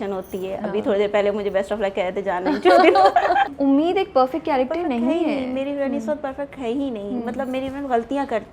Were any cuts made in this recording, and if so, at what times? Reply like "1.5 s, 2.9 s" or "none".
3.5 s